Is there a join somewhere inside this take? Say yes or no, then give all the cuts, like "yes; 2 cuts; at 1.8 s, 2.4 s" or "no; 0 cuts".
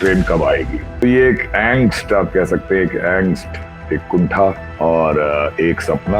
yes; 2 cuts; at 1.0 s, 4.7 s